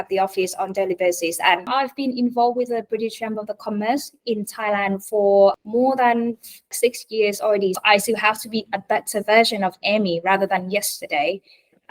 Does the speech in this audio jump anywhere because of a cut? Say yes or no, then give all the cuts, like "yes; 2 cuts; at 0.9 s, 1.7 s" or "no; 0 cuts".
yes; 4 cuts; at 1.7 s, 5.5 s, 6.7 s, 7.8 s